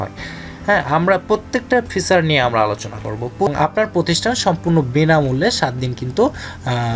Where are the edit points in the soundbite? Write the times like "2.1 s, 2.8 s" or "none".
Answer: 3.5 s